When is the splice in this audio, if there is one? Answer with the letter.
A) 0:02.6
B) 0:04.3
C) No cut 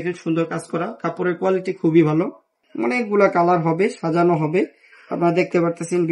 A